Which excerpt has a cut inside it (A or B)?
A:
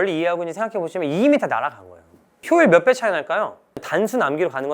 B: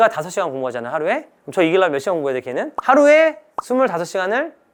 A